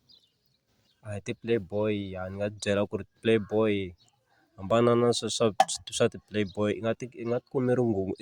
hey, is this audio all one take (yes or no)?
yes